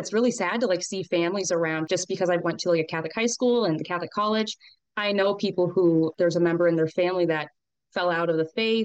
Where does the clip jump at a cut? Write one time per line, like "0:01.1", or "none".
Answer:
0:01.8
0:06.1